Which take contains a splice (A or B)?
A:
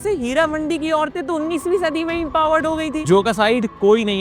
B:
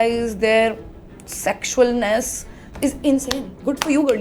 A